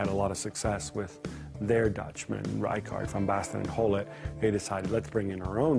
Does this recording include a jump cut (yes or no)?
yes